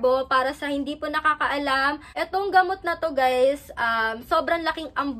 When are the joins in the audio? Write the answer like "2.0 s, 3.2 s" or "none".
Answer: 2.0 s

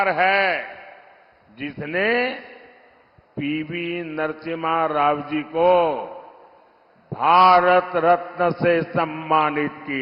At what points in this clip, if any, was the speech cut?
none

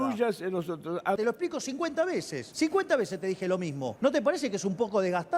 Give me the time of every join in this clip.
1.2 s, 2.4 s, 3.9 s

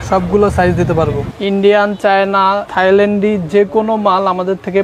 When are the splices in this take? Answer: 1.3 s

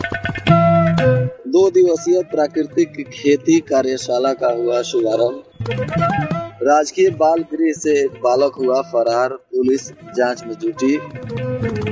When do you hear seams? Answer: 1.3 s

